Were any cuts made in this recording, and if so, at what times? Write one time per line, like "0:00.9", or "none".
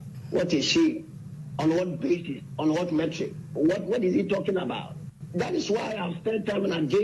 none